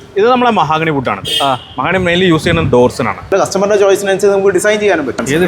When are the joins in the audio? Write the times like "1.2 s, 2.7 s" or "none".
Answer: 3.3 s